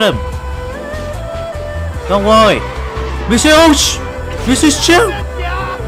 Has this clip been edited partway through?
no; 0 cuts

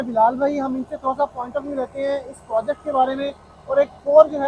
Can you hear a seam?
no; 0 cuts

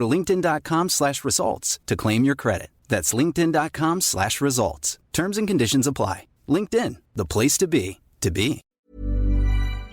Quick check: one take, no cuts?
no; 1 cut; at 8.7 s

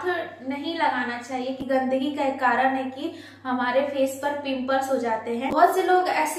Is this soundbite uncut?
no; 2 cuts; at 1.6 s, 5.5 s

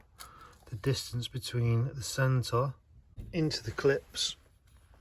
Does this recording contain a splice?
yes; 1 cut; at 3.2 s

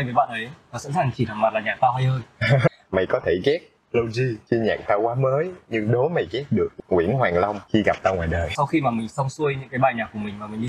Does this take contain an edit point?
yes; 5 cuts; at 2.7 s, 4.4 s, 6.7 s, 7.6 s, 8.5 s

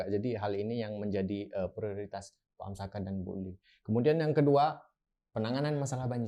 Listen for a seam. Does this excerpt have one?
no; 0 cuts

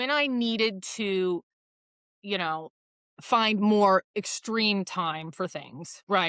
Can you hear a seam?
no; 0 cuts

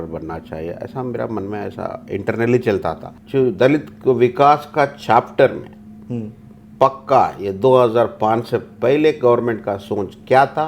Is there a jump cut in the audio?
yes; 1 cut; at 3.1 s

